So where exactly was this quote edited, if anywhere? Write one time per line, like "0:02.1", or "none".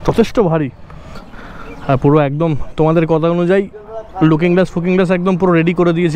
0:01.3